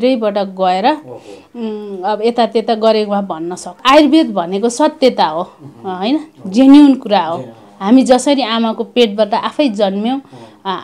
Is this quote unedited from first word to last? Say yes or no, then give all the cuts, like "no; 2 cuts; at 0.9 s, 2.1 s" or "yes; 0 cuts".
no; 1 cut; at 3.8 s